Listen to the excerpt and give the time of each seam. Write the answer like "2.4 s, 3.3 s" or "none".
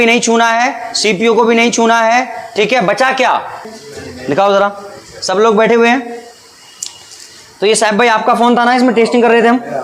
3.7 s